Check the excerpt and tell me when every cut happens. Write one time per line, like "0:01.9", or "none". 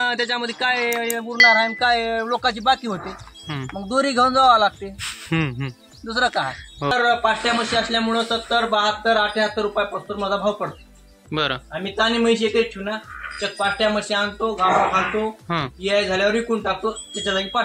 0:06.9